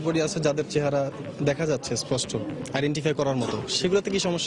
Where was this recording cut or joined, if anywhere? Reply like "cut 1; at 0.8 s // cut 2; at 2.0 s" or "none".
none

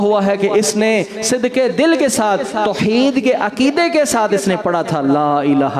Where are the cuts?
none

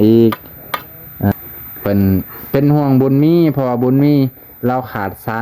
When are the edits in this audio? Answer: cut 1; at 1.3 s

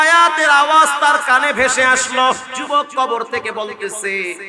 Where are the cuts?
cut 1; at 2.5 s

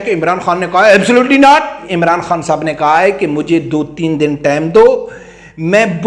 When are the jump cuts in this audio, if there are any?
cut 1; at 1.9 s

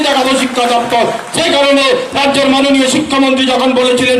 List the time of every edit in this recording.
none

